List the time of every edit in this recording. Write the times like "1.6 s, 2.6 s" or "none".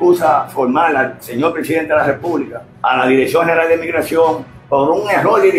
2.6 s, 4.5 s